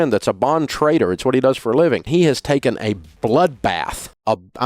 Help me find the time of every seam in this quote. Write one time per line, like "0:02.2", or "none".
0:02.0